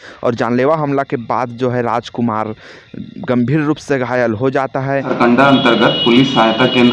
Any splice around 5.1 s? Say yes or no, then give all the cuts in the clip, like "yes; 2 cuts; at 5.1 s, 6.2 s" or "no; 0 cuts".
yes; 1 cut; at 5.1 s